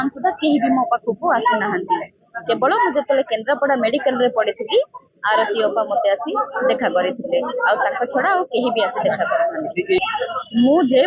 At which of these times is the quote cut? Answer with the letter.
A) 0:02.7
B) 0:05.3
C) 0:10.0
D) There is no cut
C